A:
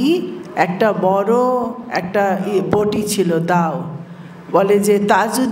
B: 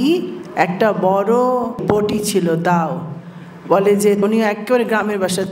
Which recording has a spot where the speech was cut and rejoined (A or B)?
B